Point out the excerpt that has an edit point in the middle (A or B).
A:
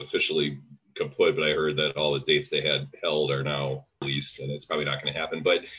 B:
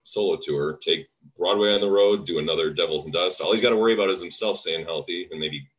A